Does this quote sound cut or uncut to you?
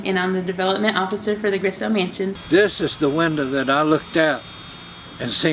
cut